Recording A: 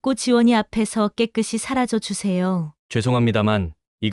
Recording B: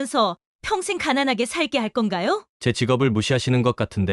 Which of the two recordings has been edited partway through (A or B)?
A